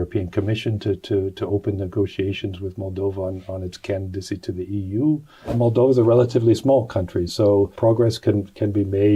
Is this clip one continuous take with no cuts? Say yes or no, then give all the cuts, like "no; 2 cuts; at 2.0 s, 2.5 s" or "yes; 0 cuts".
no; 2 cuts; at 5.5 s, 7.7 s